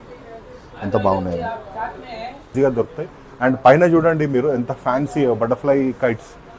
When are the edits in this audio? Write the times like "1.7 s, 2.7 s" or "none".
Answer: 2.5 s

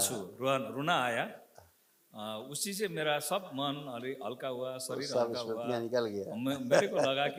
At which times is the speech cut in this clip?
none

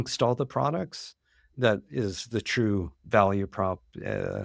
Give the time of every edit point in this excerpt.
1.5 s

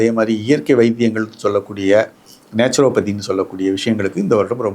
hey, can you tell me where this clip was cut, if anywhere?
none

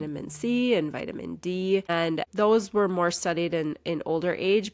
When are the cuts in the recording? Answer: 1.9 s

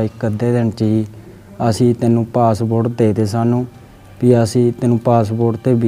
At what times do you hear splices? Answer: none

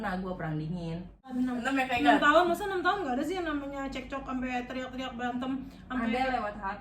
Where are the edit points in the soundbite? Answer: 1.3 s

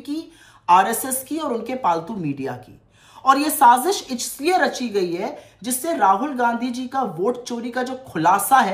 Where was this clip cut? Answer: none

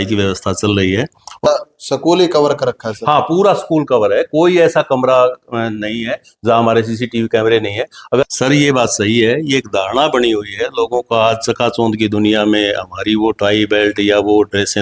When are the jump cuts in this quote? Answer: 1.5 s, 8.2 s

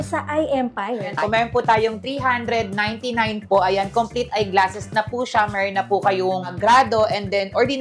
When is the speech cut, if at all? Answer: 1.1 s, 6.5 s

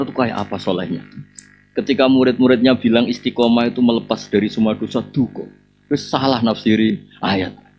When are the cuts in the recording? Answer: none

